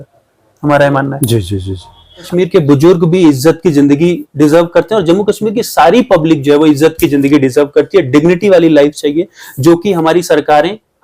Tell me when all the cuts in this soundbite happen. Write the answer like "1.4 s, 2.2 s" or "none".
2.3 s